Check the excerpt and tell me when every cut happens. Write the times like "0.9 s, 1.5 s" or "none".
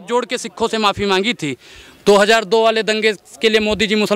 none